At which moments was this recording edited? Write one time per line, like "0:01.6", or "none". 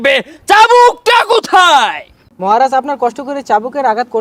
none

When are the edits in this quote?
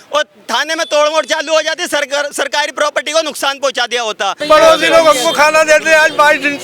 0:04.4

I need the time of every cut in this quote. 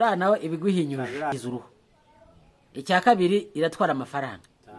0:01.3

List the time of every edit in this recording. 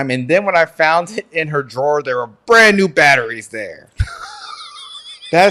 none

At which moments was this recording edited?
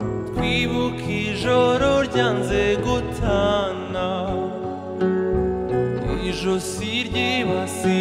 none

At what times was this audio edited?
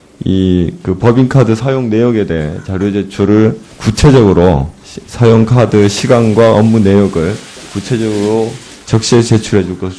0:02.3

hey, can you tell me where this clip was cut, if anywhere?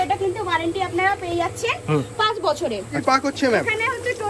0:03.0

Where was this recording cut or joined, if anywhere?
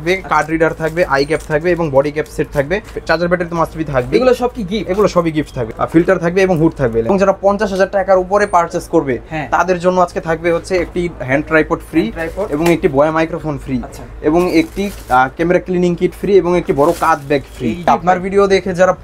0:03.0
0:05.6
0:07.1
0:17.9

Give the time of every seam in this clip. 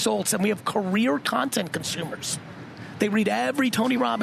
none

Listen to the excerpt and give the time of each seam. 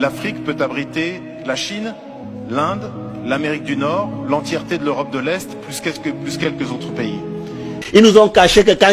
0:07.8

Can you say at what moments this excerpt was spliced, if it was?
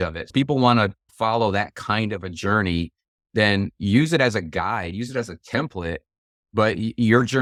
none

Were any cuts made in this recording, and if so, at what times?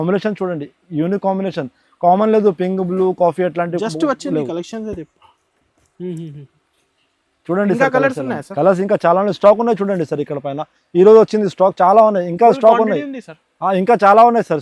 none

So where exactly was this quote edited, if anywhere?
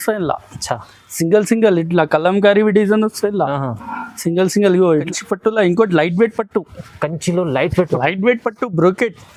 0:05.1

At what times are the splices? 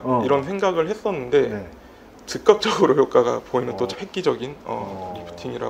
0:04.0

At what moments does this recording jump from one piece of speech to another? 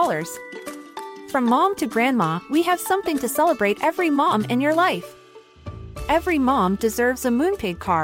none

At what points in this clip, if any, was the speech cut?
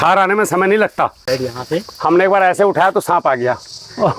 0:01.2

